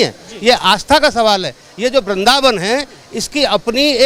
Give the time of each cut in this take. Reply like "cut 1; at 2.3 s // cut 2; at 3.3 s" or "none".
none